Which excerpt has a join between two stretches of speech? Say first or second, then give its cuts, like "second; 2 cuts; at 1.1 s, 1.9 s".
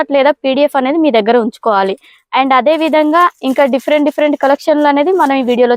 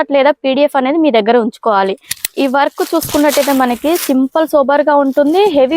second; 1 cut; at 2.2 s